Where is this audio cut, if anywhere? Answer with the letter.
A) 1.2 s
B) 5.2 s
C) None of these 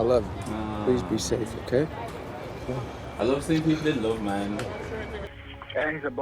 B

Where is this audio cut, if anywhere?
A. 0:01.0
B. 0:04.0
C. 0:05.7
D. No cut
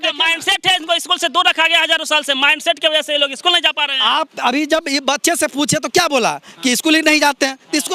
D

